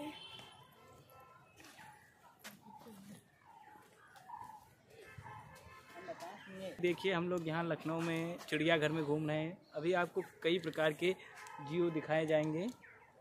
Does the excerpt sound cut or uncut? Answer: cut